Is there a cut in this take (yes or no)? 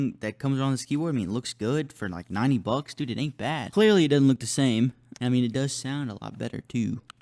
yes